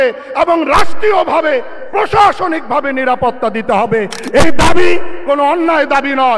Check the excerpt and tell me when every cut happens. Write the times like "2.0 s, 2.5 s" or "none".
none